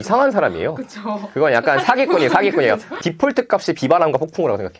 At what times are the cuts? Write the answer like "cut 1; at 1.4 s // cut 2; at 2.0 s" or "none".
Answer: cut 1; at 3.0 s